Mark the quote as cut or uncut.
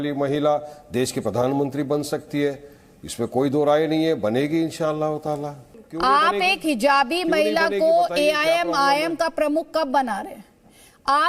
cut